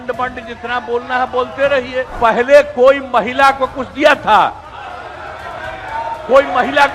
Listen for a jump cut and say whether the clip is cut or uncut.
cut